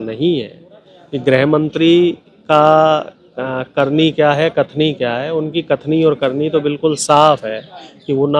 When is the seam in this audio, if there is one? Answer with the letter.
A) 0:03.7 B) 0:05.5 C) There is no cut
C